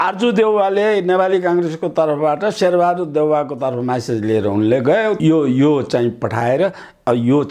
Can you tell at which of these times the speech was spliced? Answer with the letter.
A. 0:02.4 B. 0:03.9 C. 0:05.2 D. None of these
C